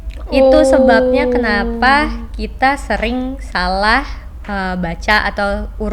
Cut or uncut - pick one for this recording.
uncut